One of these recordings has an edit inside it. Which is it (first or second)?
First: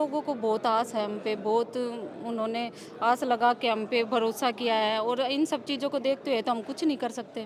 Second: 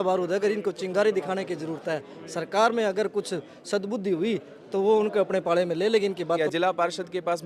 second